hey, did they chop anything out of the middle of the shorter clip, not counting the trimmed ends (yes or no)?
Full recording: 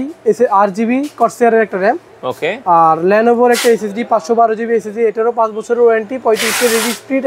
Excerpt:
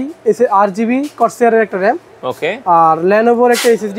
no